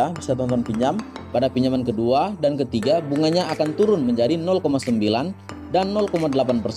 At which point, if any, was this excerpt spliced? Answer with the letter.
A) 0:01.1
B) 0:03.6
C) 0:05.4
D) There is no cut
A